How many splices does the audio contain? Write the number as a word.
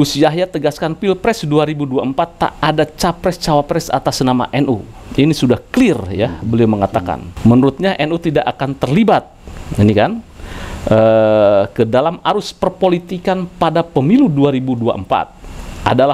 one